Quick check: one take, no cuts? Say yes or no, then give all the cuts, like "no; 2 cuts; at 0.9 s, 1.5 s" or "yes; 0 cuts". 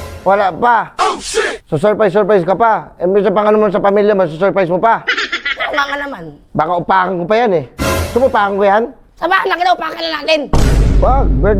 yes; 0 cuts